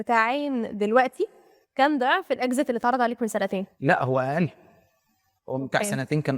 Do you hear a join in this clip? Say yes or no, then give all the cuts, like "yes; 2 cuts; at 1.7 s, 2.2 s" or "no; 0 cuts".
yes; 1 cut; at 3.7 s